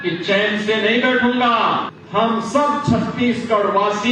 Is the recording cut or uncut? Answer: cut